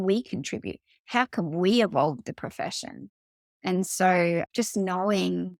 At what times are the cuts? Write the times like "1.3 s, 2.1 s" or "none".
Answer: none